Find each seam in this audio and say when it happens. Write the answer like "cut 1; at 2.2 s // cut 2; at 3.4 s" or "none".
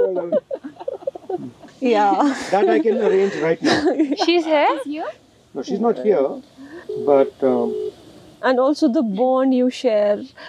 cut 1; at 1.7 s